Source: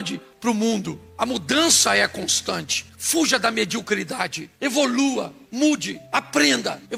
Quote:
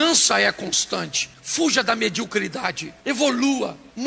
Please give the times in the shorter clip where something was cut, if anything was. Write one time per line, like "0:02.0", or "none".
none